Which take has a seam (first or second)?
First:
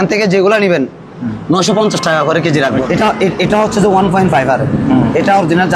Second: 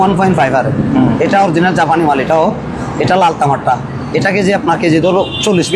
first